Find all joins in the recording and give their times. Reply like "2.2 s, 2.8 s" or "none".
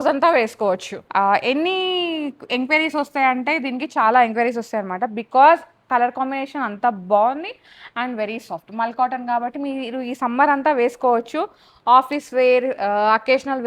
0.9 s